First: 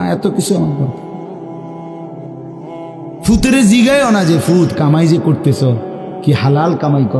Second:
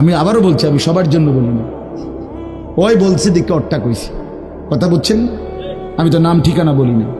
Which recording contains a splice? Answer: first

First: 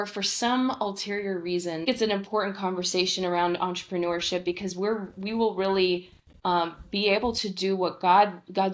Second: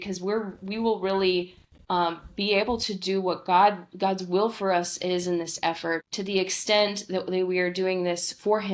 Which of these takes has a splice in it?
first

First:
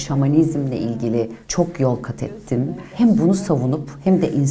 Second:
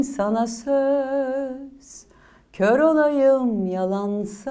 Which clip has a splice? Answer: first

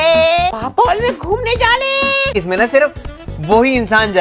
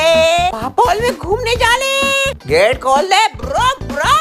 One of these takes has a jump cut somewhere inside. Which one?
first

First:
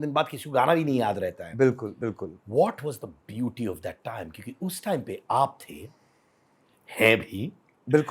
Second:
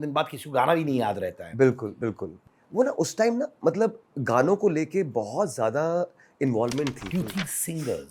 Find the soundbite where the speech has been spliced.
second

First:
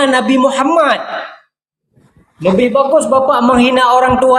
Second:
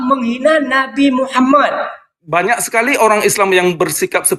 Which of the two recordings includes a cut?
second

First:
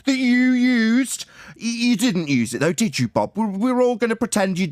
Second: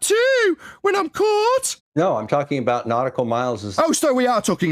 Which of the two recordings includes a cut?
second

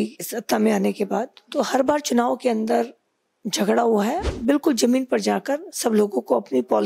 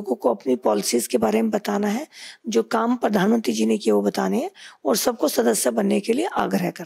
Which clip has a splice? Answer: first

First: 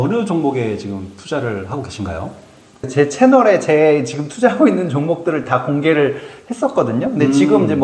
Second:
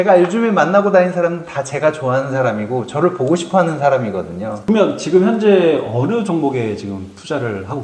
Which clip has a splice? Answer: second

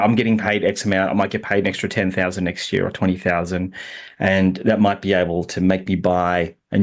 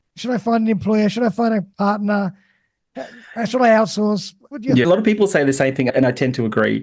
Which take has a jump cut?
second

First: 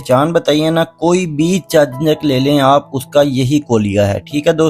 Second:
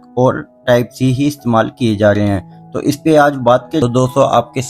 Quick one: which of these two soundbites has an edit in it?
second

